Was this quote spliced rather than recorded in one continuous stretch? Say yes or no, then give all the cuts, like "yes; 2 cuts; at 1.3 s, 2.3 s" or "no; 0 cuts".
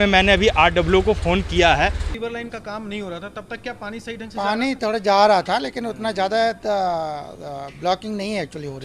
yes; 1 cut; at 1.9 s